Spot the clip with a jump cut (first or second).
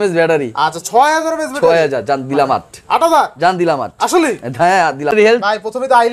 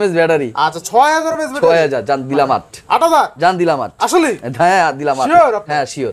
first